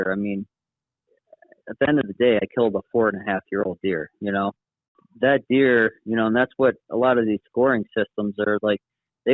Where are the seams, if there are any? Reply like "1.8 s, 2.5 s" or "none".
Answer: 5.0 s

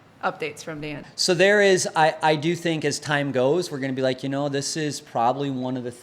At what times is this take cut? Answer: 1.1 s

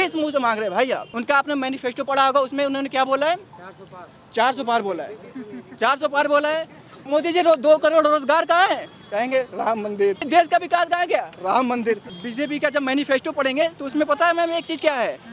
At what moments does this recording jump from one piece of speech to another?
1.1 s, 7.1 s, 10.2 s, 12.1 s

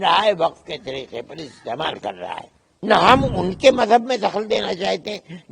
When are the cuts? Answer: 2.7 s

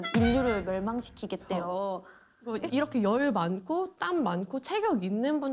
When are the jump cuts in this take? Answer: 2.5 s

